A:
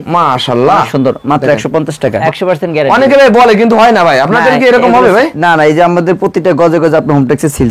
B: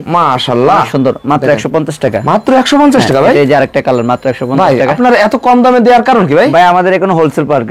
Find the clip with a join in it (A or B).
A